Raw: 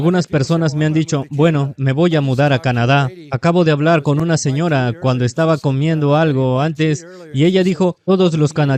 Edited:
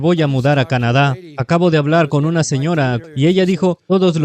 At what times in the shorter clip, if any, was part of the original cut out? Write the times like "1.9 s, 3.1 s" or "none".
3.0 s

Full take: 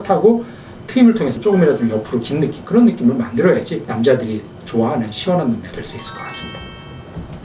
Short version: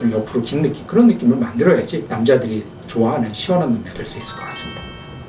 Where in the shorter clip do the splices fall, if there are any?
none

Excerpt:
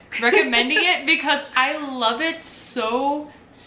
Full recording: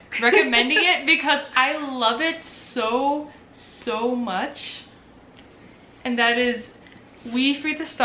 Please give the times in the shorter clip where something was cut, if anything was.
none

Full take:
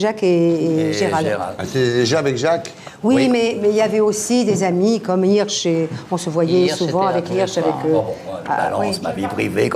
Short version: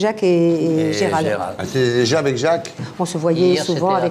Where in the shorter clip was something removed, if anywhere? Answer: 2.9 s

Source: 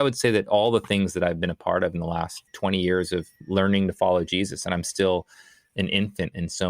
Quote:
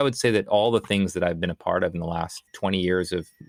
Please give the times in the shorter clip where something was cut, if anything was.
none

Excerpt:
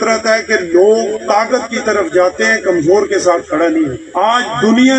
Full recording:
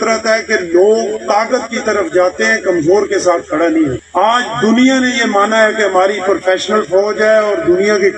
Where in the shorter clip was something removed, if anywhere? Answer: none

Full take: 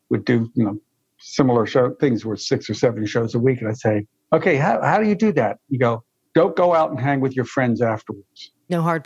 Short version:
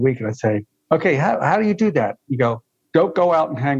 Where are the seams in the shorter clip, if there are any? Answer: none

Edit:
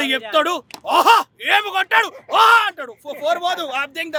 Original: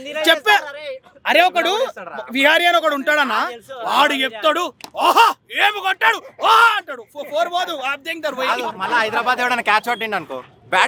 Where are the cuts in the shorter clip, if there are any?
none

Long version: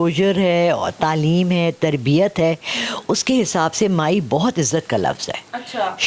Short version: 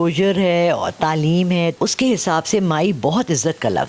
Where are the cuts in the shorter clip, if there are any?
1.7 s

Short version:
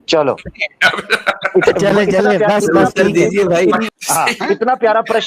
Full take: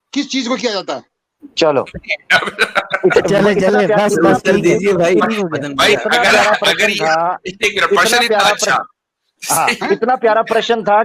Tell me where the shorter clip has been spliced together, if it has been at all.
3.9 s

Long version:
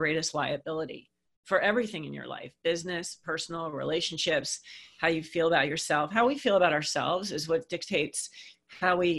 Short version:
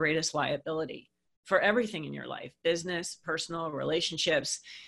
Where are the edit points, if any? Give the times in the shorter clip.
none

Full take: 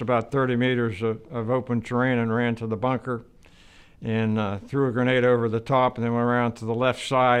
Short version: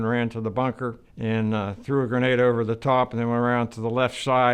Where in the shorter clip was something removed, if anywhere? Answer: 1.1 s

